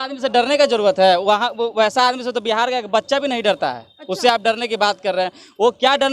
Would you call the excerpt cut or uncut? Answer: uncut